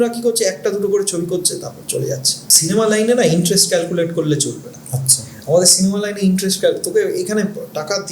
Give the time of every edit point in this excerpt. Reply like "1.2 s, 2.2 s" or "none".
2.4 s